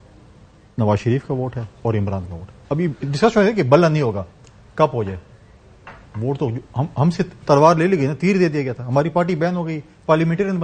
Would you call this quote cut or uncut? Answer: uncut